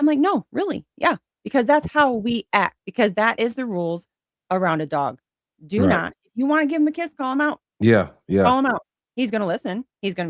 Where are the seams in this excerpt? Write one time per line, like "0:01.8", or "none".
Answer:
0:02.8
0:07.7